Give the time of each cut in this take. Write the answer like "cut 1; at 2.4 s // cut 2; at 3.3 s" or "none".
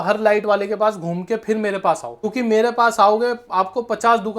cut 1; at 2.3 s